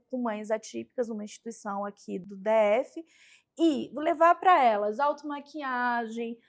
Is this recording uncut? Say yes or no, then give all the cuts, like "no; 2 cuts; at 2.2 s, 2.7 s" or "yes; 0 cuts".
no; 1 cut; at 2.3 s